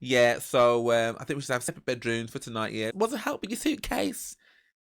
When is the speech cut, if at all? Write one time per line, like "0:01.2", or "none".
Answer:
0:01.6